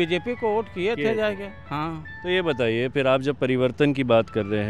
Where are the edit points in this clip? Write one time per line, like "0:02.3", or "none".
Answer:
none